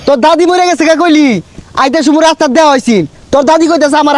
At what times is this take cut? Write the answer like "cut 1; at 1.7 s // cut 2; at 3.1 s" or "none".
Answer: none